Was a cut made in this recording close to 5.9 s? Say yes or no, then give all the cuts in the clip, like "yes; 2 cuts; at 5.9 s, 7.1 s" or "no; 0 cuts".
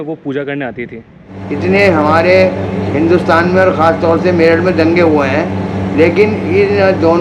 no; 1 cut; at 1.4 s